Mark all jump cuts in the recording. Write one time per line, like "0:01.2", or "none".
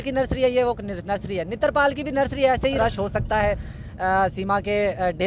0:02.8